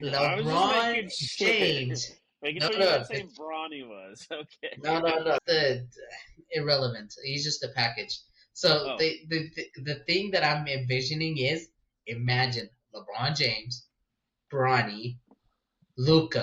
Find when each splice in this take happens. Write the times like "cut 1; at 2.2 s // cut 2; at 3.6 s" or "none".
cut 1; at 5.4 s